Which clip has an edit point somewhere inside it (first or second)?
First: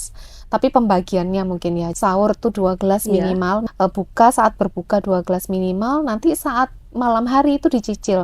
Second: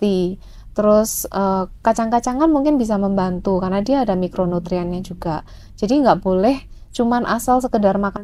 first